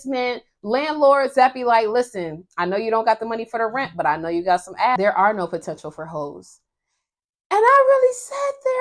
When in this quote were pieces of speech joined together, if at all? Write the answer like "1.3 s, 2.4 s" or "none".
5.0 s